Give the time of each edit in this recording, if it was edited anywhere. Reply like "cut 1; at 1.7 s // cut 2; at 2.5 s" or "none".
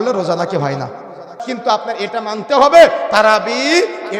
cut 1; at 1.4 s